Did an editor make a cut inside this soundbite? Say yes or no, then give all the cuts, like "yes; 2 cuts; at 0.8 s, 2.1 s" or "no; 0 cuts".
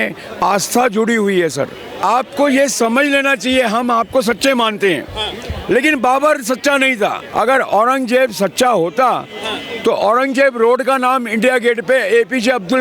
yes; 2 cuts; at 2.0 s, 7.2 s